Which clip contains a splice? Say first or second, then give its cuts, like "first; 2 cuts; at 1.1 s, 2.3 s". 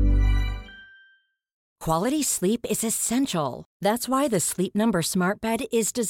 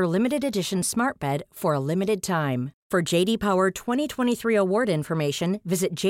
first; 1 cut; at 1.7 s